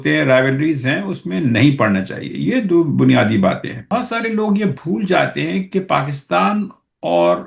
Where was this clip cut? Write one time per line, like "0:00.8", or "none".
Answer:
0:03.8